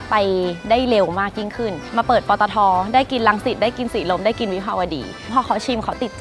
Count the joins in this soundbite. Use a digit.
1